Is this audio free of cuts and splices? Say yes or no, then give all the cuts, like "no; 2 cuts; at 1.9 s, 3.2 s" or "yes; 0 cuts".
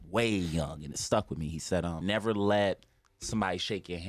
no; 1 cut; at 2.0 s